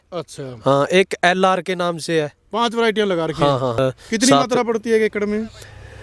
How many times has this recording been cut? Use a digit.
1